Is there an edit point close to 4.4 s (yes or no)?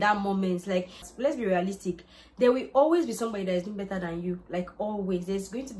no